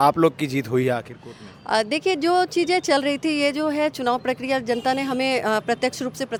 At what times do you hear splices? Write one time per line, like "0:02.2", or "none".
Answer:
none